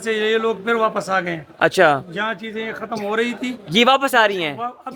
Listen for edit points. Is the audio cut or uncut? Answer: uncut